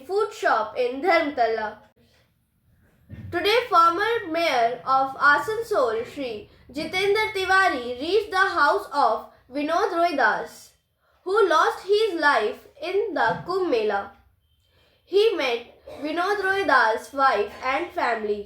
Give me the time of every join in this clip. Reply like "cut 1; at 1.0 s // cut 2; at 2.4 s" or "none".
cut 1; at 1.9 s